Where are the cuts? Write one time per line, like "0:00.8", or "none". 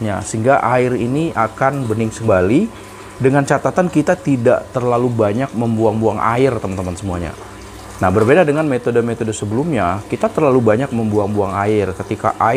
0:02.3